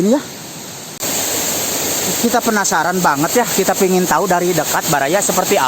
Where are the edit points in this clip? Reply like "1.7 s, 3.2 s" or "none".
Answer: 1.0 s